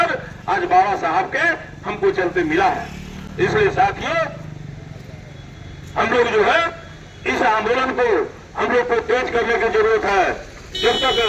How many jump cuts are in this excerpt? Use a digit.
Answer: 0